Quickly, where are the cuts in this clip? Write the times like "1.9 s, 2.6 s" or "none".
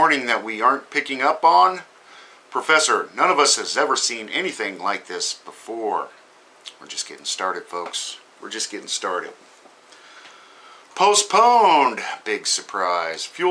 none